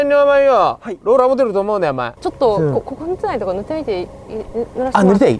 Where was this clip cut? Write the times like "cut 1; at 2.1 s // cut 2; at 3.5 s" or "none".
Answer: cut 1; at 2.1 s